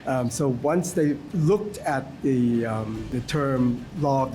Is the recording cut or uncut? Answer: cut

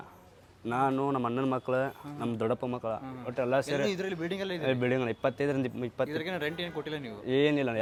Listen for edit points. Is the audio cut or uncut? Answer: uncut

